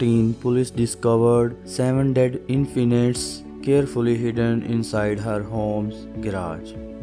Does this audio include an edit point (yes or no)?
no